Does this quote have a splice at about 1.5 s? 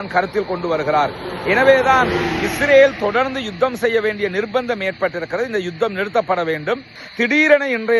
no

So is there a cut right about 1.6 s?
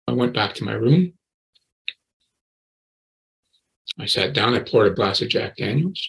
no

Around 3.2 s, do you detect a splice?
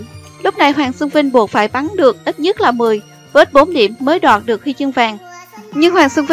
yes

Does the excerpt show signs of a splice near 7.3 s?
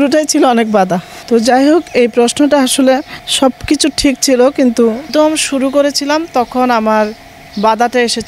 no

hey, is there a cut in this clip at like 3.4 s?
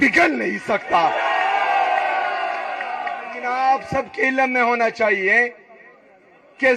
yes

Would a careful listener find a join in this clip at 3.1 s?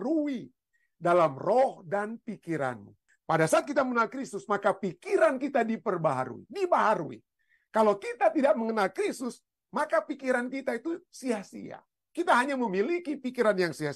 yes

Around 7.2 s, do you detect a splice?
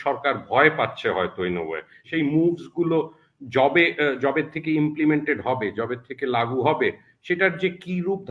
no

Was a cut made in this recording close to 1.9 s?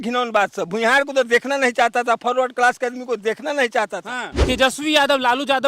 no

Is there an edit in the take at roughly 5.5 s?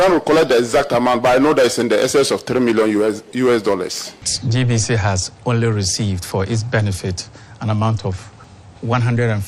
no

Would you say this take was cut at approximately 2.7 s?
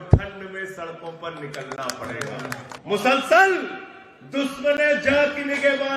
yes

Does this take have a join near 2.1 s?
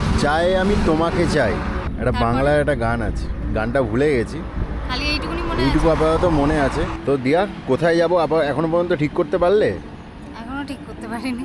no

